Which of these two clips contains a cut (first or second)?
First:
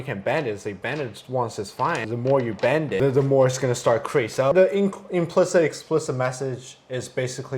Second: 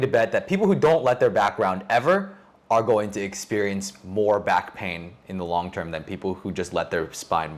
first